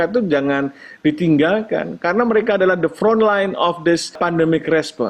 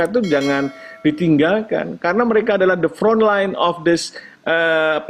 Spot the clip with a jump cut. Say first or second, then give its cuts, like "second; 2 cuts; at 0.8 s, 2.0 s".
first; 1 cut; at 4.1 s